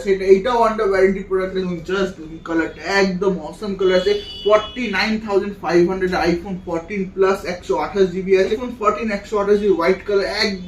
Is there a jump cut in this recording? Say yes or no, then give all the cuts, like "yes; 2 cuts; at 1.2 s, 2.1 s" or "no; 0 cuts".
yes; 2 cuts; at 1.6 s, 8.5 s